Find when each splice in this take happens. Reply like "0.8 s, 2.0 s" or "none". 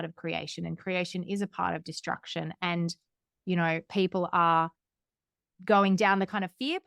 none